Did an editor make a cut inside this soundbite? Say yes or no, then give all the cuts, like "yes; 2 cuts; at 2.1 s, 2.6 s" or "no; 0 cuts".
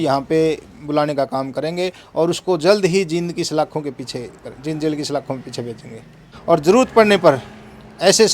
yes; 1 cut; at 6.3 s